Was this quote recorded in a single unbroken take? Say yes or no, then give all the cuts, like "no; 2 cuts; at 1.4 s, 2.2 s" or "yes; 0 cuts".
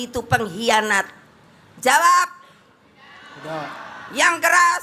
yes; 0 cuts